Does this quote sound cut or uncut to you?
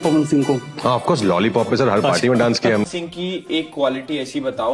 cut